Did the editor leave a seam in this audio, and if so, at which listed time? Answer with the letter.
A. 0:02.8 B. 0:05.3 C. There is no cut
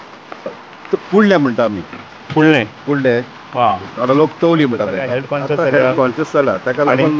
B